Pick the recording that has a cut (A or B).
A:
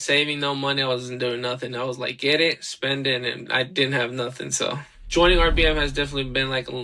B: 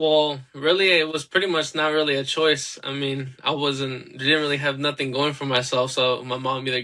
A